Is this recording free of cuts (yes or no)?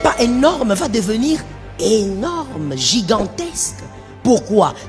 yes